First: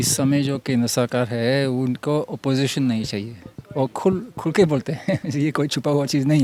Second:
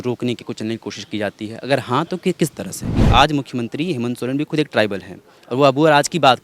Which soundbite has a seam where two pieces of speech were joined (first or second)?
second